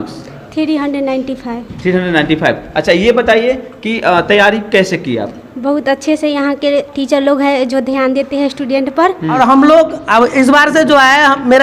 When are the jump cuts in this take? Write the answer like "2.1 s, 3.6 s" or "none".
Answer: 9.4 s